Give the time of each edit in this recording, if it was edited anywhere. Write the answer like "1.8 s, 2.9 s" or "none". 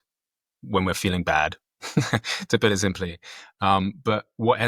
none